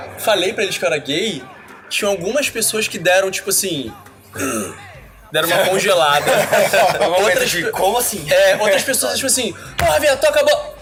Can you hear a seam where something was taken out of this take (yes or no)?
no